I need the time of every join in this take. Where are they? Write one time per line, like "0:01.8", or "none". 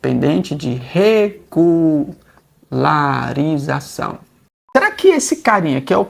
0:04.6